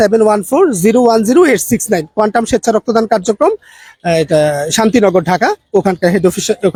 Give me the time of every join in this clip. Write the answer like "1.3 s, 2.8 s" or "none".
none